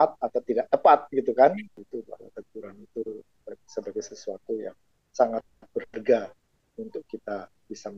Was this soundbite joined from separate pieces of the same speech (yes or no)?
yes